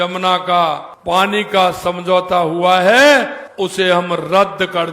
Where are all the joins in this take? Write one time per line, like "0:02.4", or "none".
0:00.9
0:03.4